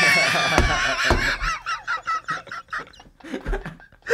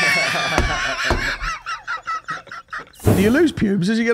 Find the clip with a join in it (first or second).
second